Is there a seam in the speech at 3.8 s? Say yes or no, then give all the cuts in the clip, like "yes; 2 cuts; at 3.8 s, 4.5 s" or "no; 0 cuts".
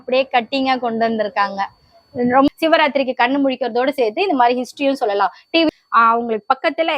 no; 2 cuts; at 2.5 s, 5.7 s